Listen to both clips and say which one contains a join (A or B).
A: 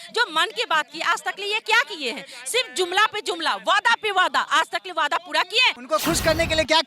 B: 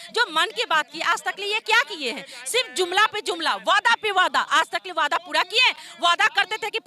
A